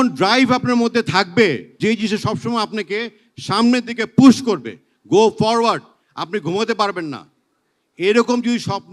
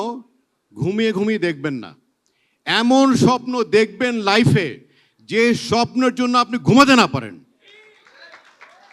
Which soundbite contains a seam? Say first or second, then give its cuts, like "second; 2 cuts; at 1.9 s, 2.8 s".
first; 1 cut; at 1.7 s